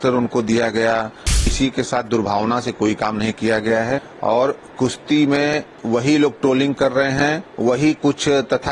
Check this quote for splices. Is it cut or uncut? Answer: cut